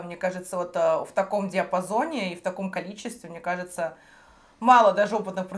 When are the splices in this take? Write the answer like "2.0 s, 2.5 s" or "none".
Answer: none